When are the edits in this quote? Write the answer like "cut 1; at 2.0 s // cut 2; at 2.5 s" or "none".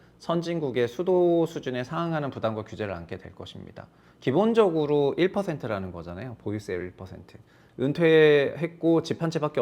cut 1; at 7.5 s